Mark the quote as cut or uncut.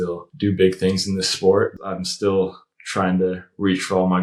cut